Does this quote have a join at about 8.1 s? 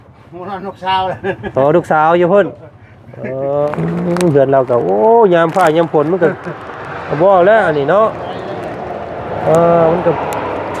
no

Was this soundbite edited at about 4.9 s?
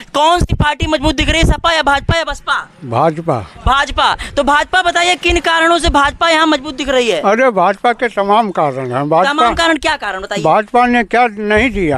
no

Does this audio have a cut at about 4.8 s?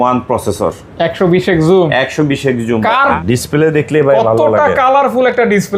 no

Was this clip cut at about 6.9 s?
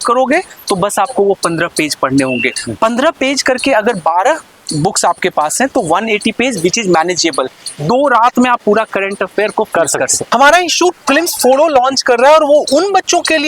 no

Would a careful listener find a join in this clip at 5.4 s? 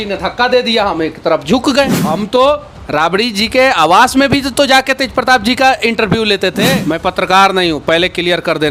no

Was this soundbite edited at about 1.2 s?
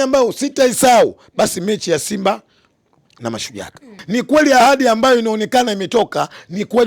no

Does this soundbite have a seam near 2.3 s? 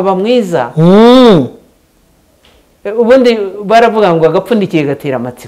no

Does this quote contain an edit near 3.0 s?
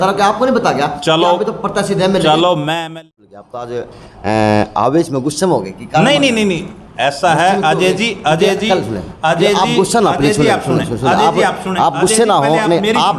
yes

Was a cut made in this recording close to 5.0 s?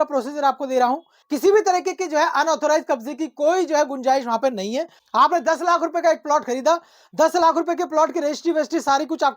yes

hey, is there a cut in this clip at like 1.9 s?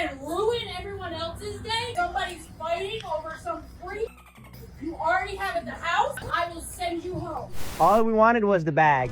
yes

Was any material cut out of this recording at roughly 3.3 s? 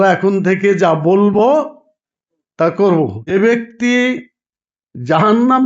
yes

